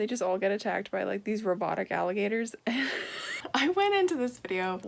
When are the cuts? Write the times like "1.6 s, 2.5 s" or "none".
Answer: 3.3 s

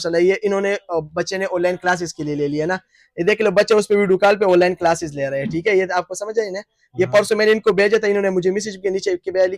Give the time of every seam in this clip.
none

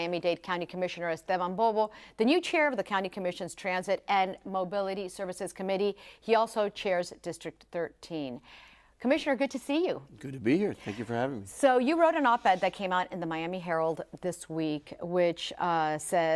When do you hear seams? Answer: 2.0 s

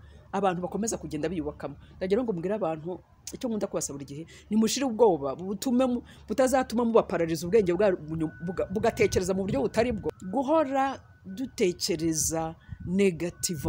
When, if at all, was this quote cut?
10.1 s

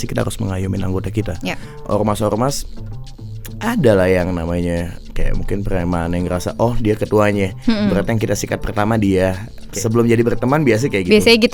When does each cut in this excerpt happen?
1.8 s, 9.6 s

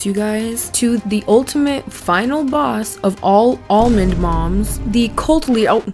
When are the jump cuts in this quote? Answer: 1.0 s

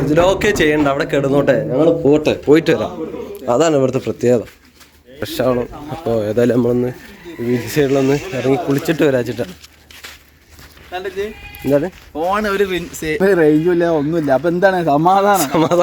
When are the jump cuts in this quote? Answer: 5.2 s

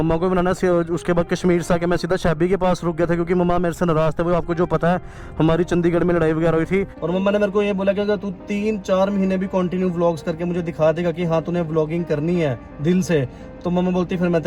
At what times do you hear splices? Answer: 7.0 s

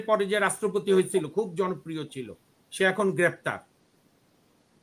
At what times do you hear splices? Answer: none

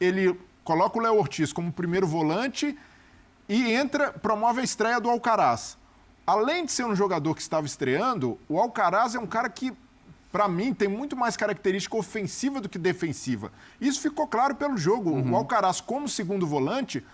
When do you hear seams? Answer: none

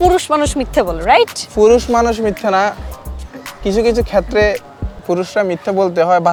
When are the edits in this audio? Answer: none

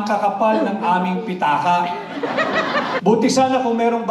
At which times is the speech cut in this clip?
3.0 s

